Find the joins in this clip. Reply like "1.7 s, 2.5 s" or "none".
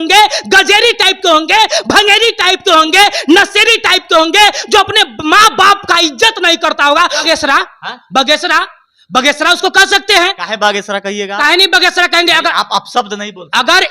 7.2 s